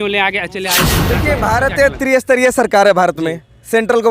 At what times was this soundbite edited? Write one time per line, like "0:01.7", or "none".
0:01.0